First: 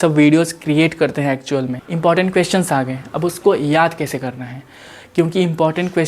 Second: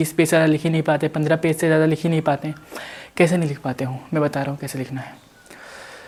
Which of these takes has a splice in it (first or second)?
first